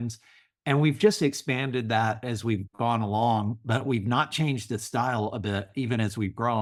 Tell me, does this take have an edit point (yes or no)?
no